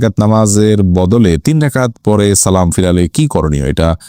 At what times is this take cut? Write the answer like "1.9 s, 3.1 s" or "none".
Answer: none